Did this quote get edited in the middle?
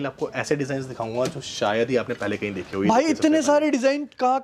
no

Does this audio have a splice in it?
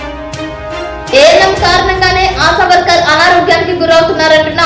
no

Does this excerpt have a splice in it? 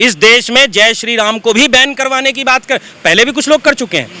no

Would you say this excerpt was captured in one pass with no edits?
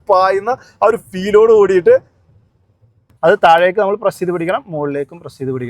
no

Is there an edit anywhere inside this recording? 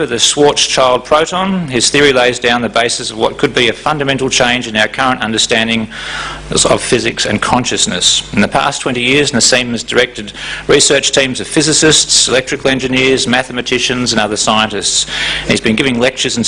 no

